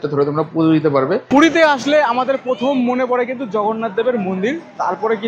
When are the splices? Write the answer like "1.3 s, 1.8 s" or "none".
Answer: 1.2 s

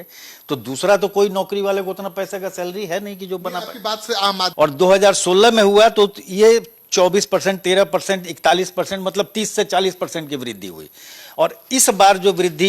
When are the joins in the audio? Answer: 4.5 s

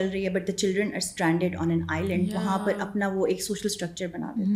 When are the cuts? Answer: none

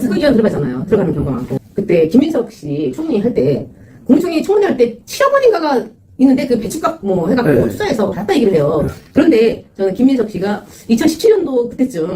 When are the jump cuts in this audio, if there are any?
1.6 s

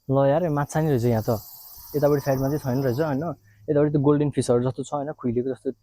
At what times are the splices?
none

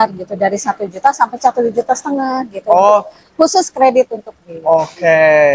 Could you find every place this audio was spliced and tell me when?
none

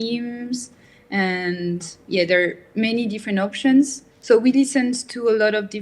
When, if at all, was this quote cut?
4.1 s

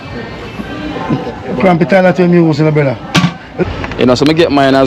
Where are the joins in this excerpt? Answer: 3.6 s

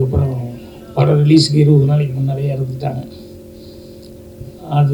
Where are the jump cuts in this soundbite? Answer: none

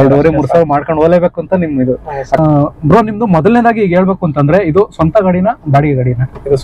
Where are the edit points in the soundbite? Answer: 2.4 s

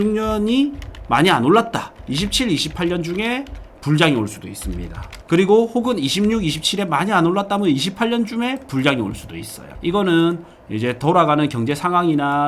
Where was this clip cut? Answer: 2.0 s

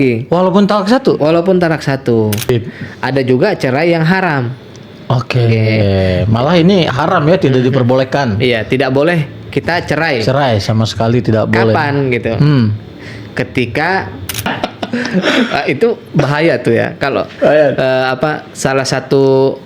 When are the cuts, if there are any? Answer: 2.5 s, 14.5 s

